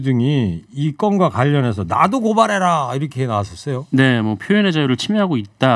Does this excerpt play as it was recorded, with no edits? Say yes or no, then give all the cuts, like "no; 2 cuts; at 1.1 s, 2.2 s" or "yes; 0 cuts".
yes; 0 cuts